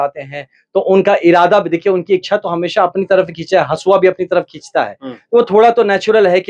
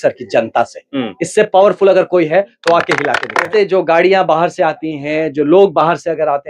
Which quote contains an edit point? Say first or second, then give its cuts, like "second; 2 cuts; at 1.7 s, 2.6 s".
second; 1 cut; at 3.5 s